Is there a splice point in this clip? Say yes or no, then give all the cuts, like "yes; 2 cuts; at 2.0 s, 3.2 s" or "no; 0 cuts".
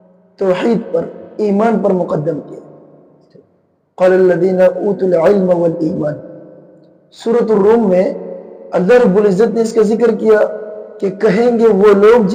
no; 0 cuts